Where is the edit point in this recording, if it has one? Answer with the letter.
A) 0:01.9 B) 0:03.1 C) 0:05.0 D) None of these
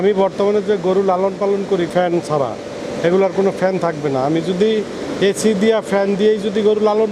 D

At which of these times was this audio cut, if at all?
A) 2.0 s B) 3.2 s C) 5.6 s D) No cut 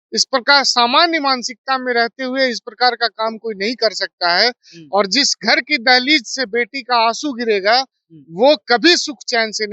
D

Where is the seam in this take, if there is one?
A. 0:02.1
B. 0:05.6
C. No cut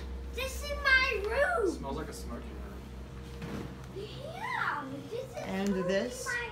C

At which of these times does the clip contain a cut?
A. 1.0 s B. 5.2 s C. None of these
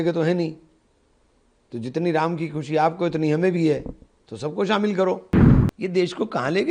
B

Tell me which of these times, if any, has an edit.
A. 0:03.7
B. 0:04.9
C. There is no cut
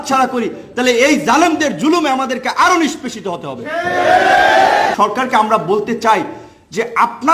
B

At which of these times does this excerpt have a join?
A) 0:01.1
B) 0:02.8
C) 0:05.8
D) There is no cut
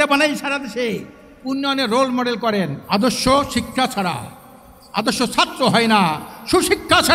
B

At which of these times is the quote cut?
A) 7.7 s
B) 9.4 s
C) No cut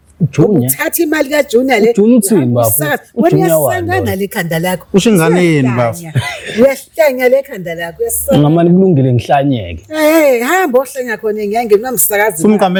C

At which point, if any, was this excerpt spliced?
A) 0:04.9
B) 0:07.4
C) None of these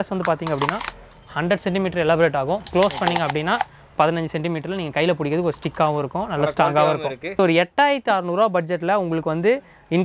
B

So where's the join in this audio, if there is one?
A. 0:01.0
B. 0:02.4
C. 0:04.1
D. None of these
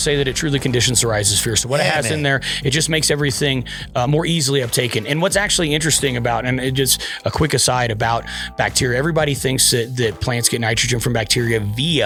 D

